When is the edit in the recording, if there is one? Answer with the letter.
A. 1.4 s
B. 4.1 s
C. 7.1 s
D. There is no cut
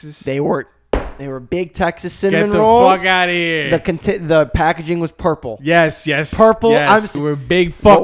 C